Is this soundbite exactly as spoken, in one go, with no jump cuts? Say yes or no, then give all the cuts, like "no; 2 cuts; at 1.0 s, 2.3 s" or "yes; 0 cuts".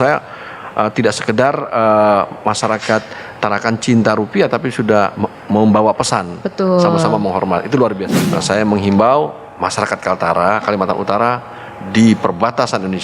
no; 1 cut; at 8.1 s